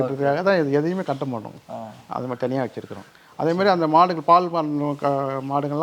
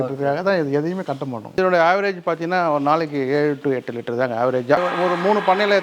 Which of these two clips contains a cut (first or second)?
second